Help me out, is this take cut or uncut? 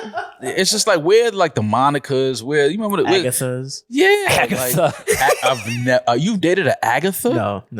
uncut